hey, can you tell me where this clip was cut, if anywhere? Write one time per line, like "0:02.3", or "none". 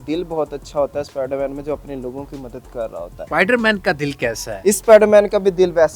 0:03.2
0:04.5